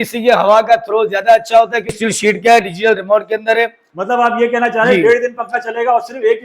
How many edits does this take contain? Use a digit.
1